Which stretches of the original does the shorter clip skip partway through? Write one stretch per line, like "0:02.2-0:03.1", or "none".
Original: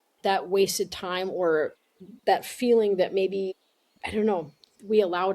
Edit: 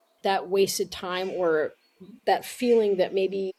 none